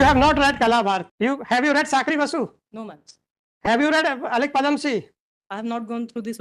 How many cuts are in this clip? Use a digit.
1